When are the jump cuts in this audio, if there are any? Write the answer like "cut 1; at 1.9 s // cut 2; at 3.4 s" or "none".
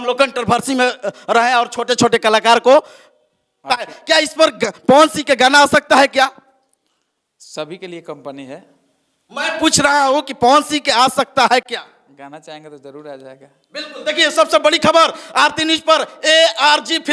cut 1; at 3.9 s